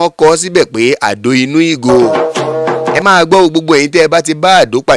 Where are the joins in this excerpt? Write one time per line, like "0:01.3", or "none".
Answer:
none